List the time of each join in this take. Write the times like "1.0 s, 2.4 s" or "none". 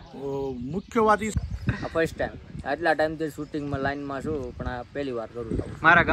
1.3 s

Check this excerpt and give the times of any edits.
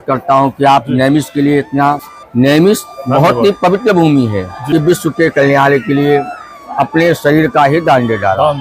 2.2 s, 4.5 s

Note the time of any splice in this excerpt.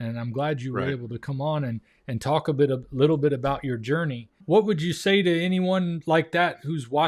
4.3 s

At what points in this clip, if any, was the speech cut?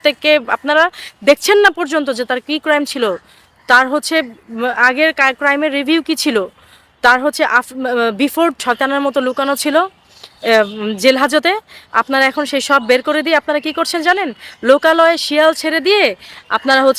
8.6 s

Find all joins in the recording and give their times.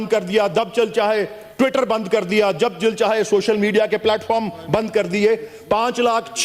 none

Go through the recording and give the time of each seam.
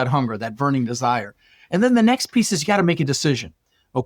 none

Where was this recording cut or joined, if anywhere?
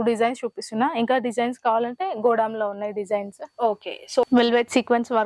4.2 s

